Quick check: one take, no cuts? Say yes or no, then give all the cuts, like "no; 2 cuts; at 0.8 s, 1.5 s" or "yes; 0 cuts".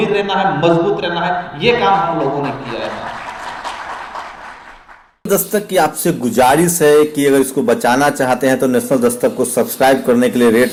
yes; 0 cuts